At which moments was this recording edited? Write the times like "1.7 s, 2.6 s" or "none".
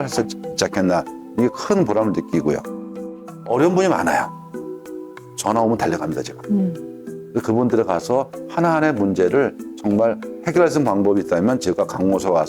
3.1 s